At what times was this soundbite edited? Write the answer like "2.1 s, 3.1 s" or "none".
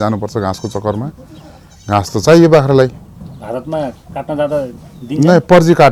none